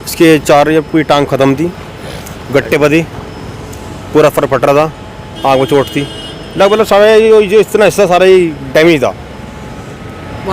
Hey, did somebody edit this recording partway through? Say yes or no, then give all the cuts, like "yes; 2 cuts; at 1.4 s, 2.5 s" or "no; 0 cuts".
no; 0 cuts